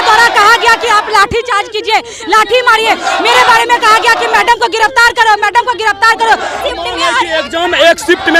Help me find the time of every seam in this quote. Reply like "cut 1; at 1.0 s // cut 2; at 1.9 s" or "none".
cut 1; at 6.6 s